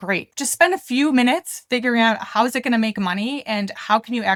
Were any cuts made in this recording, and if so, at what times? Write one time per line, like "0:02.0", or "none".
none